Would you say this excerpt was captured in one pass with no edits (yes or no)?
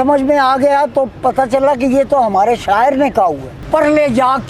no